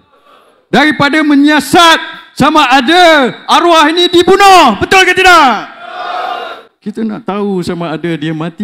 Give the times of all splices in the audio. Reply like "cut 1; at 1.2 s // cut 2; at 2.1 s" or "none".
none